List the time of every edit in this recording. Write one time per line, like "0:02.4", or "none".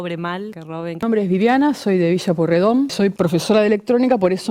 0:01.0
0:02.9